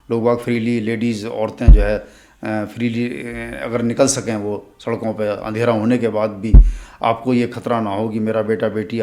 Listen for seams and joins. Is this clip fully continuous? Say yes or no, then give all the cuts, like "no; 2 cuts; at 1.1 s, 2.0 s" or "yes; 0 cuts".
yes; 0 cuts